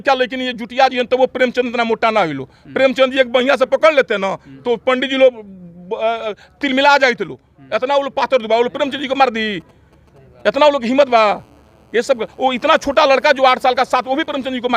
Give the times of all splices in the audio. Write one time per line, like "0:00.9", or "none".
none